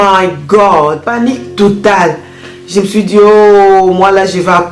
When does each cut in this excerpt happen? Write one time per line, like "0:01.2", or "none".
0:01.1